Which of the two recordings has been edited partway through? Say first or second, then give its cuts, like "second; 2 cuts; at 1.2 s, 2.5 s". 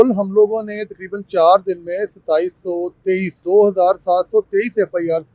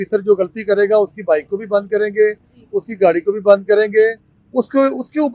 first; 1 cut; at 3.4 s